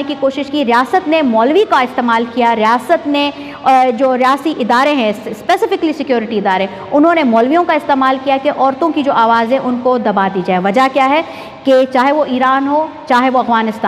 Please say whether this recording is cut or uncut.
uncut